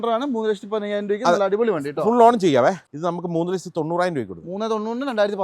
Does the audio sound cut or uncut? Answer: cut